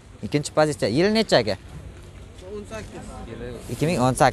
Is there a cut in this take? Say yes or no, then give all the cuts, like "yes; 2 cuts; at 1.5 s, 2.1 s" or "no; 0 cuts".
no; 0 cuts